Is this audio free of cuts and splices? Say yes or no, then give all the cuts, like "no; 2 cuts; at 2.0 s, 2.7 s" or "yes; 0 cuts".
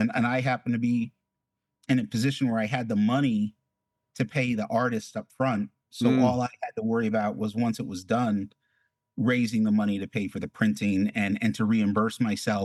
yes; 0 cuts